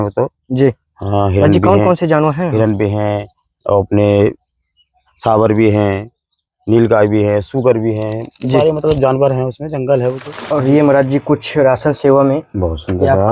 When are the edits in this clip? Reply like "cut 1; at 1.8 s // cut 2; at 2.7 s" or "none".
cut 1; at 10.3 s